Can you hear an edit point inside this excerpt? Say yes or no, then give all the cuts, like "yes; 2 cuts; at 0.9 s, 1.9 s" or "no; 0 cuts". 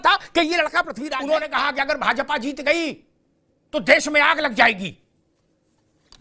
yes; 1 cut; at 1.0 s